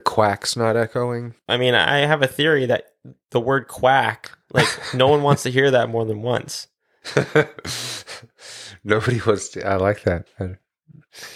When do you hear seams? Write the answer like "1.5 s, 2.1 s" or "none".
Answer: 1.3 s